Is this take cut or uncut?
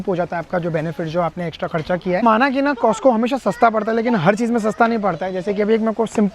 cut